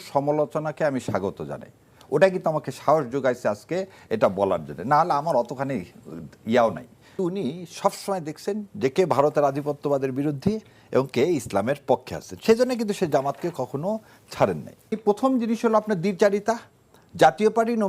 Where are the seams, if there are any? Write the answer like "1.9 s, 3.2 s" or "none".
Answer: 7.1 s, 14.9 s